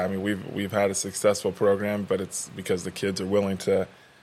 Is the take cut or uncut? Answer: uncut